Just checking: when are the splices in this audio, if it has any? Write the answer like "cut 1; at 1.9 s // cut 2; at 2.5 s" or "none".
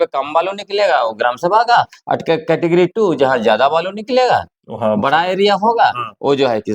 none